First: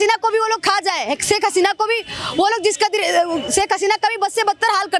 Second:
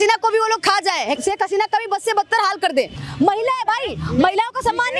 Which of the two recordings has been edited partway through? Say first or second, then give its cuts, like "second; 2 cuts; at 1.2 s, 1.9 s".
second; 2 cuts; at 1.2 s, 3.0 s